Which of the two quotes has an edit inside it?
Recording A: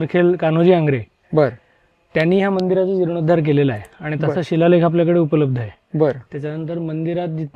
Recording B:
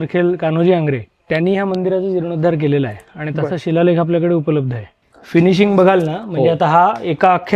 B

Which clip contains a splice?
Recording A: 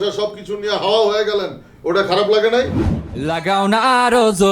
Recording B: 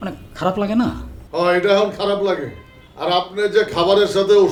A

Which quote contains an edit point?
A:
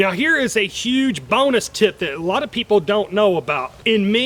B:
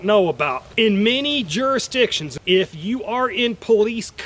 B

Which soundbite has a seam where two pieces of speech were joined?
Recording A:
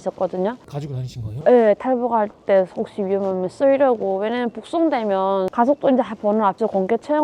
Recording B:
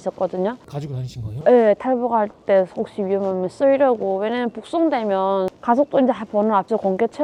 A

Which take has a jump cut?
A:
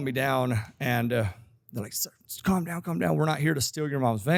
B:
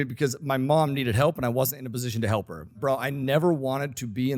B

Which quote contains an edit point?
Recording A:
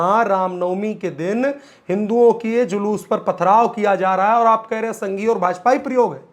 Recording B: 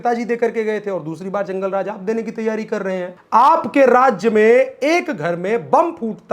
B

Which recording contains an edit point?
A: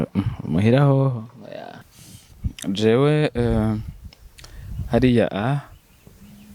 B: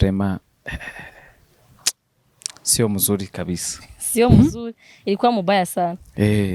A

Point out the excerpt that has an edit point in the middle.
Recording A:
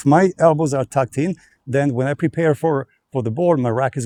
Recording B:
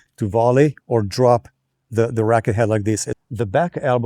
B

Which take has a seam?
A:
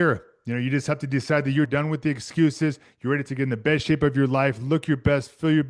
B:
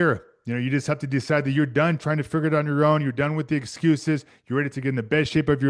A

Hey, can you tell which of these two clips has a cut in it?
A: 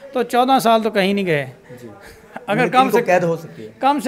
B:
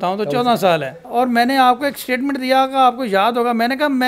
B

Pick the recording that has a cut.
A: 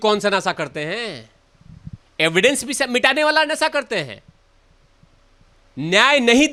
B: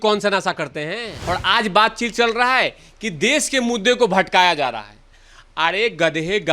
B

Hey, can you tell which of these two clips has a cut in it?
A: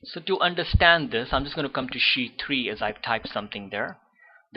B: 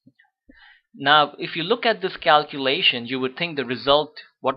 A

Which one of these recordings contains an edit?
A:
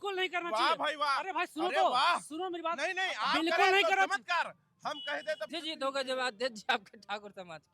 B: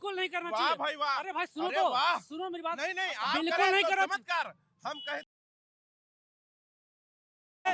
A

